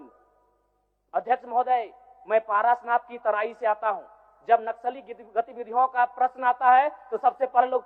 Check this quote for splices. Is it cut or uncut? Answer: uncut